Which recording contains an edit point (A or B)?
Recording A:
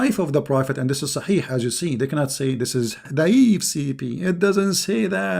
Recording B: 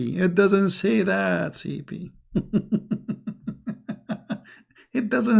A